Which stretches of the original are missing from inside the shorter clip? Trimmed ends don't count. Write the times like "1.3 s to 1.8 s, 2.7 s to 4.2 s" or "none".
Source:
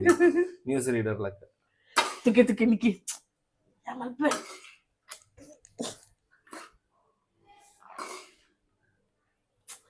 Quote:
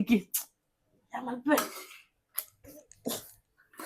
none

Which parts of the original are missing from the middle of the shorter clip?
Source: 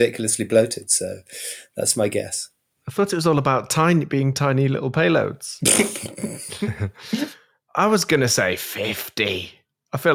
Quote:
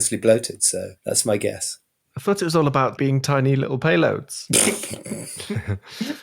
1.2 s to 1.7 s, 3.7 s to 4.1 s

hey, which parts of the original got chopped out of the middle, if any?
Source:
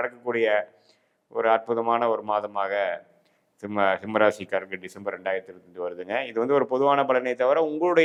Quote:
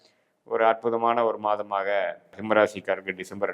3.2 s to 4.0 s

